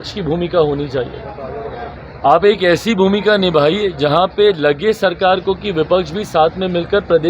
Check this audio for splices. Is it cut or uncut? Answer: uncut